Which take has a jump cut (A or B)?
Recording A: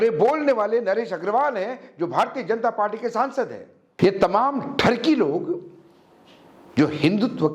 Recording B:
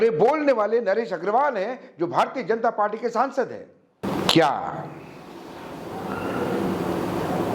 A